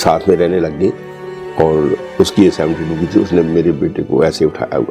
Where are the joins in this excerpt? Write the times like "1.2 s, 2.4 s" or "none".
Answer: none